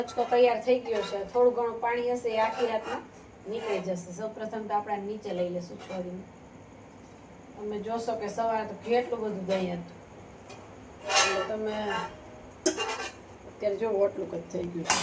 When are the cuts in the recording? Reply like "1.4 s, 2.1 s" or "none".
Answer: none

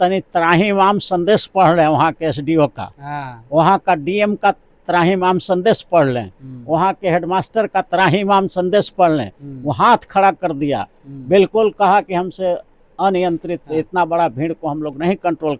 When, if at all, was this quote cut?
none

